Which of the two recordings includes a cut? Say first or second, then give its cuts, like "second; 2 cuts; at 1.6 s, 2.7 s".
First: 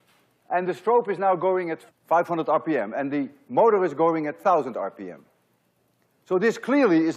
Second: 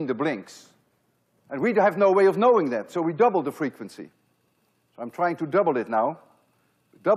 first; 1 cut; at 4.7 s